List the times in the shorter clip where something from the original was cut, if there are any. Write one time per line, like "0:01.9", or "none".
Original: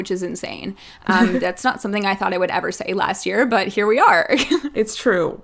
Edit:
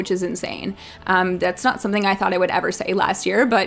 none